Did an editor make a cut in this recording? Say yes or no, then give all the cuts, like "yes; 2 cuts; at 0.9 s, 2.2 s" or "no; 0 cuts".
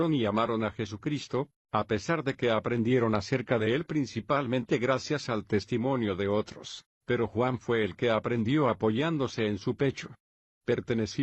yes; 1 cut; at 1.7 s